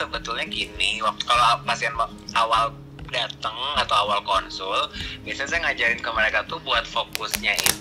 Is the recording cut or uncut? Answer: uncut